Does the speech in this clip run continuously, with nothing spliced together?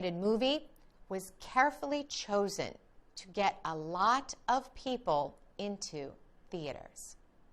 no; 1 cut; at 6.1 s

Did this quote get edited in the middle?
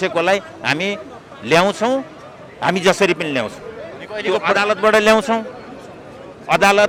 no; 0 cuts

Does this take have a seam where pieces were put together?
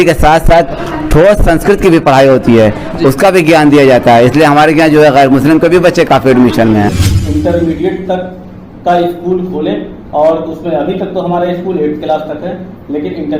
yes; 1 cut; at 7.0 s

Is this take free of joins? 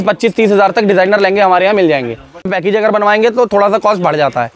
no; 1 cut; at 2.5 s

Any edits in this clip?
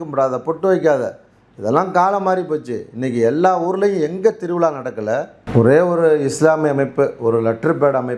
yes; 1 cut; at 5.4 s

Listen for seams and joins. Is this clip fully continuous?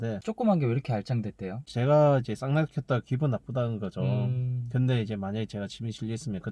yes; 0 cuts

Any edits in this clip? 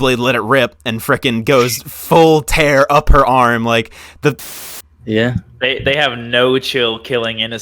yes; 1 cut; at 4.5 s

